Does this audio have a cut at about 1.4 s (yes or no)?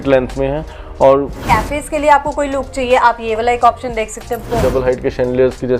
yes